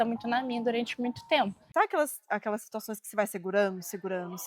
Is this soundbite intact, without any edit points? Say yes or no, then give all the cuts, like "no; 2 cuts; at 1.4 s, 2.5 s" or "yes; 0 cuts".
no; 1 cut; at 1.6 s